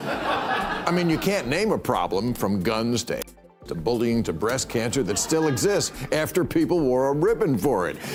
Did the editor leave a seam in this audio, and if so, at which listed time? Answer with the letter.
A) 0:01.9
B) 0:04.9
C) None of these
C